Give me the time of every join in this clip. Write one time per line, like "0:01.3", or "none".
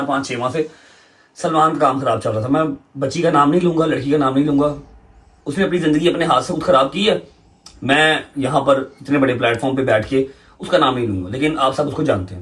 none